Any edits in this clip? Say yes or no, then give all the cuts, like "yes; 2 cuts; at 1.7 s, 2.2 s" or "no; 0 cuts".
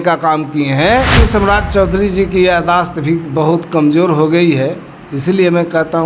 yes; 1 cut; at 1.1 s